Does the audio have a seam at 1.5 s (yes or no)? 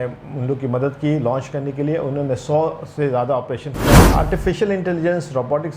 no